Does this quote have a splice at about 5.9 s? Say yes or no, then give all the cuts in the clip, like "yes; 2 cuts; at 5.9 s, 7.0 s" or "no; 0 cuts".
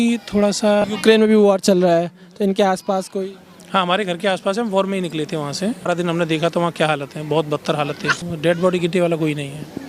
yes; 3 cuts; at 0.8 s, 5.9 s, 8.2 s